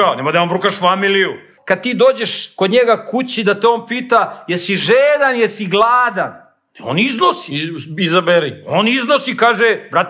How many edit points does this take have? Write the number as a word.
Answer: one